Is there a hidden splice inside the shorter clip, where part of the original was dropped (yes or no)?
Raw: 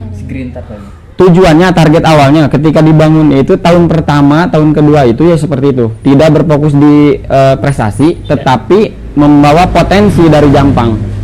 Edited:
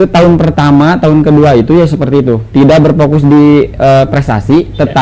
no